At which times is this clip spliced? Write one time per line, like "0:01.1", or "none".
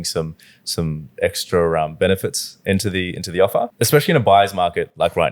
0:03.7